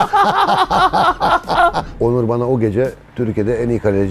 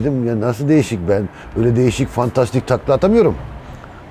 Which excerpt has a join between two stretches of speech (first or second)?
first